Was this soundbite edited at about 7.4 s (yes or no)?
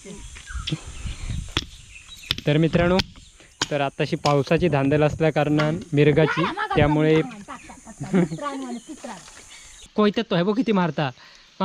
no